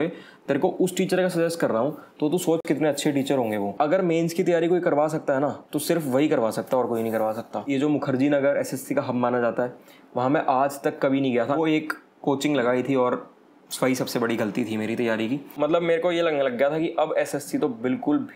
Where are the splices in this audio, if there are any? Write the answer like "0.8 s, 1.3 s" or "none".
3.7 s, 7.7 s, 11.6 s, 15.5 s

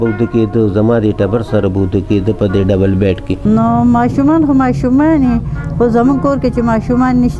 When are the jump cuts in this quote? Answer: 3.3 s

